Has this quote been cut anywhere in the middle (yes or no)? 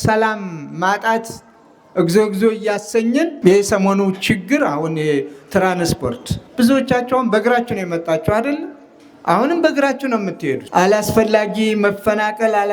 yes